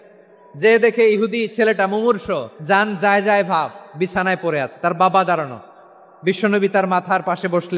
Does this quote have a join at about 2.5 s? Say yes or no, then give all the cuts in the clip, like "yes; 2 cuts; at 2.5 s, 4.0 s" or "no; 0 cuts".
yes; 1 cut; at 2.5 s